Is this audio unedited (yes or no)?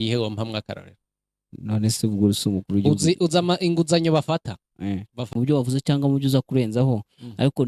no